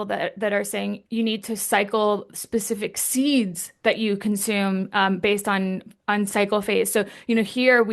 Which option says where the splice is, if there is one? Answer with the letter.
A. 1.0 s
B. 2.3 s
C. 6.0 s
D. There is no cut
A